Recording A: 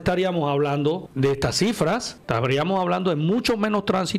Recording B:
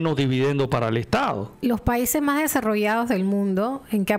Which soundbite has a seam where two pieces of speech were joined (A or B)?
A